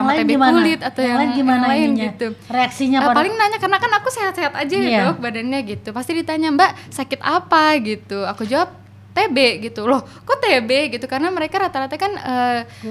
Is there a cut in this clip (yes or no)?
no